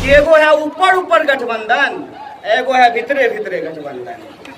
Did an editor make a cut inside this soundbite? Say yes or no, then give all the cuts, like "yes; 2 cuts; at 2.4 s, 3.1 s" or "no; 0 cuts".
no; 0 cuts